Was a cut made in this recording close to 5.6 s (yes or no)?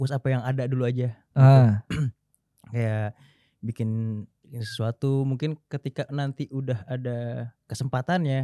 no